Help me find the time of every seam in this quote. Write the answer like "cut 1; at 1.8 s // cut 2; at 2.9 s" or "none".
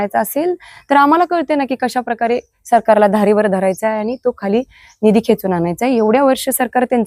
none